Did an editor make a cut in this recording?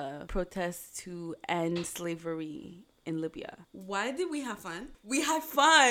no; 0 cuts

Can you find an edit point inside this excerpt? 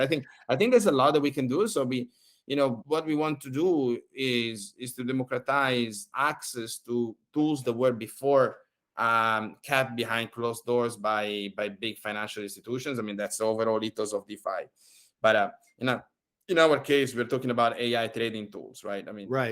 yes; 1 cut; at 2.8 s

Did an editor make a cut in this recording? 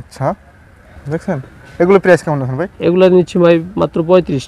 no; 0 cuts

